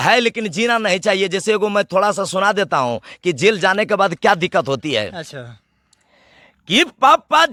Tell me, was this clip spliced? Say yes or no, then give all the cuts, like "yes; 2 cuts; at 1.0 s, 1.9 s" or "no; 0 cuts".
no; 0 cuts